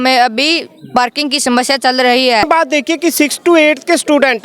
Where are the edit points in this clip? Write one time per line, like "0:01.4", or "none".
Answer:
0:02.4